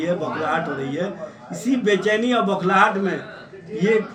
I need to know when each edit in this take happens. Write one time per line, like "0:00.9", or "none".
none